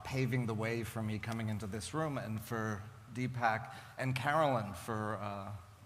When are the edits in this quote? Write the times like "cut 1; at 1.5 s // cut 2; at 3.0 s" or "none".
cut 1; at 3.9 s

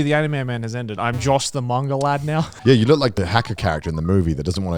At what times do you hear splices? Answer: cut 1; at 2.5 s // cut 2; at 3.1 s

